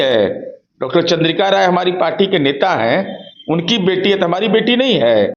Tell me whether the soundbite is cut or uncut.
uncut